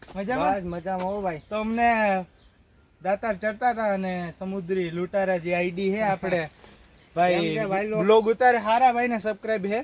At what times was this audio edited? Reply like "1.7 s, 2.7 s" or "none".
none

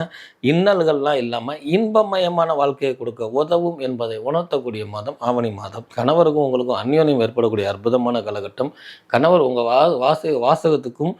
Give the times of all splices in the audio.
5.8 s

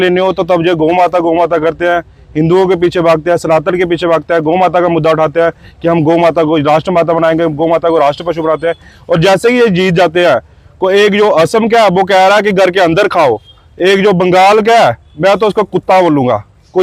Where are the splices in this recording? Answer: none

